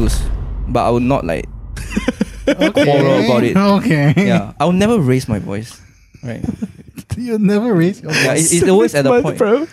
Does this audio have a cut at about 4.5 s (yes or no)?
no